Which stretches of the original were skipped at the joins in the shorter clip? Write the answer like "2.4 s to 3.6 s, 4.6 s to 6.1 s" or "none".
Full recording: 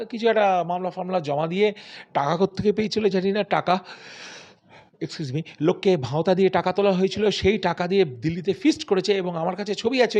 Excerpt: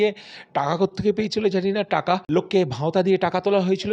3.8 s to 5.6 s